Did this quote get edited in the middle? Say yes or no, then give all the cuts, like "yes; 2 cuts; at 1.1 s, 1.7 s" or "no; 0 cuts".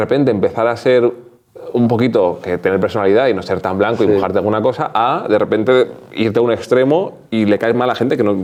no; 0 cuts